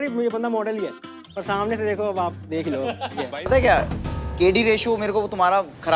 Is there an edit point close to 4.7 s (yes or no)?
no